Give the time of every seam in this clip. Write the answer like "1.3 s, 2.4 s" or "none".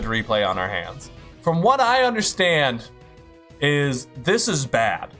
1.3 s